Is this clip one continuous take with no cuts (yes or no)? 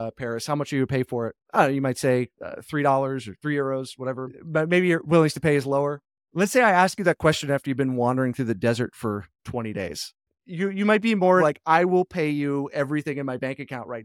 no